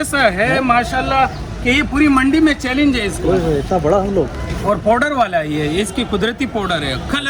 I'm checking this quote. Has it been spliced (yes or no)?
no